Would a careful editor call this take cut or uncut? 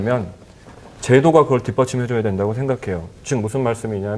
uncut